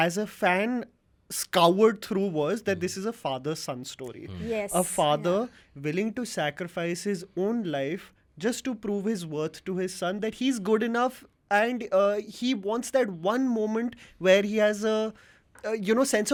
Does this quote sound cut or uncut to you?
uncut